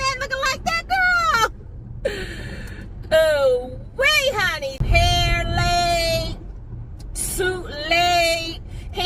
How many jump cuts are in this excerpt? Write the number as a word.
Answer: one